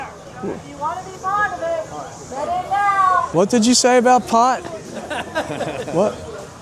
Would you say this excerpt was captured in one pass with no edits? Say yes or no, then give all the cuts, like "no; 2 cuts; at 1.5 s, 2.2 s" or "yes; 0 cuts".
no; 1 cut; at 3.3 s